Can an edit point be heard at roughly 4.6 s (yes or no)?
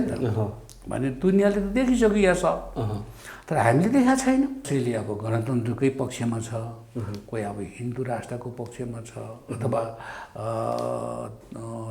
yes